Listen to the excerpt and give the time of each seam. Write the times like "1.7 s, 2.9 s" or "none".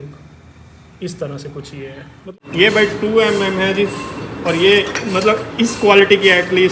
2.3 s